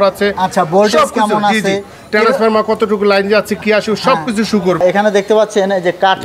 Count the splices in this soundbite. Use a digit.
1